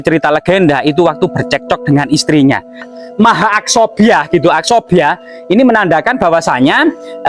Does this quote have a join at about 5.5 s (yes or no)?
no